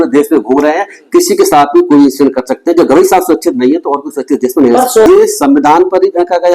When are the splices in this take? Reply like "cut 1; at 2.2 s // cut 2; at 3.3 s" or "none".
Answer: cut 1; at 5.1 s